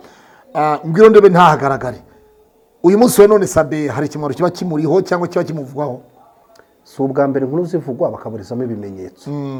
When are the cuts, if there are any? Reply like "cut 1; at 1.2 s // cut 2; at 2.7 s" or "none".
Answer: none